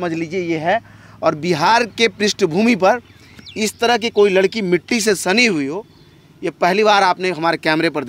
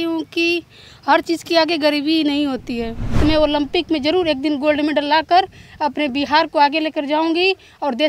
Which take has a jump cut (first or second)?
second